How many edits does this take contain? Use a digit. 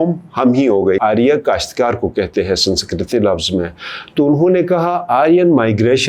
1